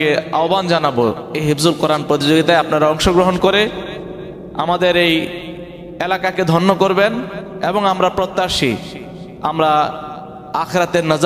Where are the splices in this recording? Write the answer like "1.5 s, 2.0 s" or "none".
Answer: none